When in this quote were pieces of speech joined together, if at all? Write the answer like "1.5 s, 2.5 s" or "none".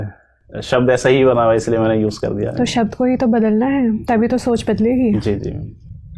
none